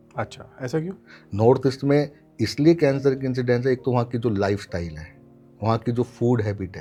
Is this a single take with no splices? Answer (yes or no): yes